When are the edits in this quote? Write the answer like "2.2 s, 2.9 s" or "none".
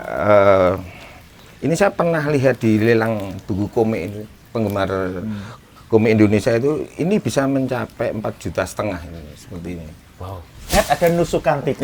10.7 s